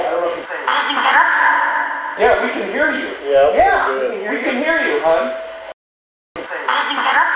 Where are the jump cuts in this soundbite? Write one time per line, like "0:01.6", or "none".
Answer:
0:06.4